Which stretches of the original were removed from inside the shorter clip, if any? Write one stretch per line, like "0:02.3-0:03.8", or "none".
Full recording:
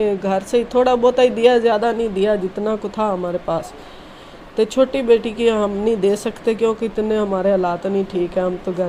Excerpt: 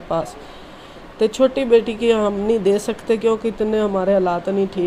none